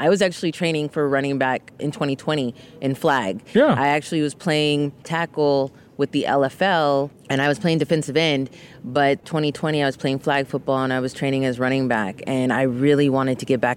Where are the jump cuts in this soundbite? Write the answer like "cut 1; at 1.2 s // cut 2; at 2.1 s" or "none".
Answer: cut 1; at 1.7 s // cut 2; at 5.1 s // cut 3; at 7.2 s // cut 4; at 9.2 s